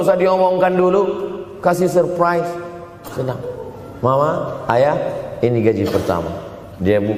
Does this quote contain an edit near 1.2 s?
no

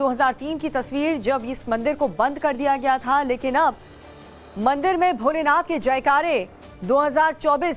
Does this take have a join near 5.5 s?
no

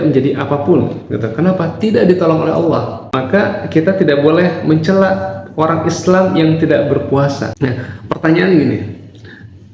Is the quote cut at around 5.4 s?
no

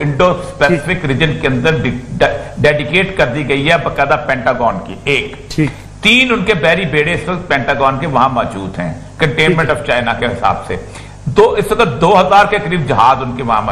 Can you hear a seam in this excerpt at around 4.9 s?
no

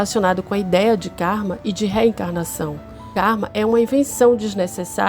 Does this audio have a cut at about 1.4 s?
no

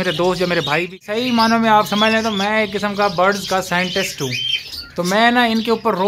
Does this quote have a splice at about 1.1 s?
yes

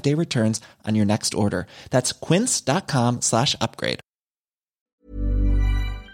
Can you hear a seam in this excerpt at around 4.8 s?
yes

